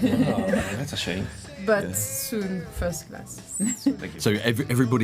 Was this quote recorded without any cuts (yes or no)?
no